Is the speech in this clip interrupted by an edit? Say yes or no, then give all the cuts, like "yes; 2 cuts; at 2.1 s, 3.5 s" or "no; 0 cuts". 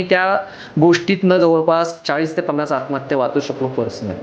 no; 0 cuts